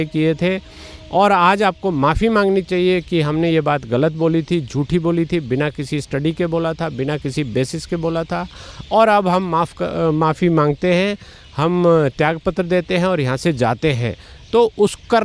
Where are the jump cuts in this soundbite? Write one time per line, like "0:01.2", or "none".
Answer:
none